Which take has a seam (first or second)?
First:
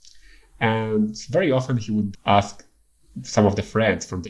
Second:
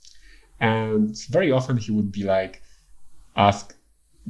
first